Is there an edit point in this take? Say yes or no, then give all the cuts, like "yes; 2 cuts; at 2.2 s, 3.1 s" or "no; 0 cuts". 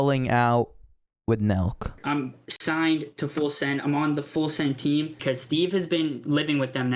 yes; 2 cuts; at 2.0 s, 5.2 s